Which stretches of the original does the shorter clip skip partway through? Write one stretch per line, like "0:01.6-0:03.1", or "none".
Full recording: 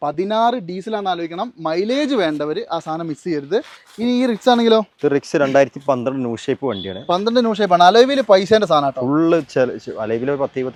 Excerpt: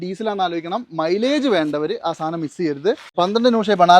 0:03.7-0:07.0